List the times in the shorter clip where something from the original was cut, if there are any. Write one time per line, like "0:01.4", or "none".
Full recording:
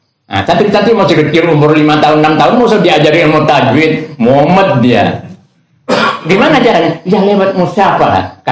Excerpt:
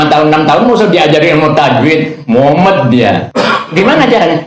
0:03.3